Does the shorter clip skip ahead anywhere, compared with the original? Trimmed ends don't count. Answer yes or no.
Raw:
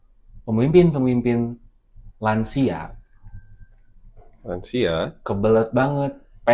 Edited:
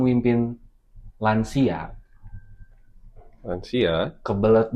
no